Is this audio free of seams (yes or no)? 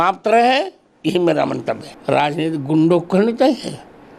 no